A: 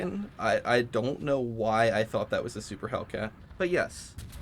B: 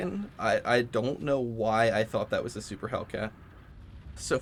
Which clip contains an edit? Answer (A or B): A